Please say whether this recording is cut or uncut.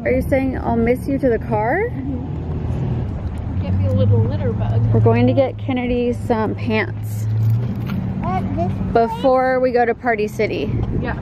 cut